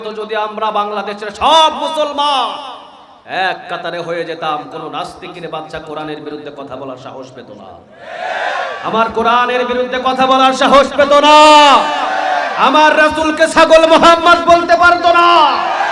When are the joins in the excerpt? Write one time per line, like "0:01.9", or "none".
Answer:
none